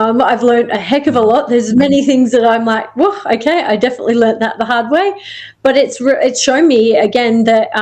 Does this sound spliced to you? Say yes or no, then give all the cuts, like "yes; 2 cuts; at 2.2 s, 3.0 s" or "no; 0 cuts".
no; 0 cuts